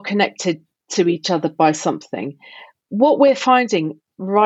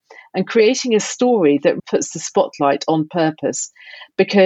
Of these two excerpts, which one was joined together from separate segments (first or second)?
second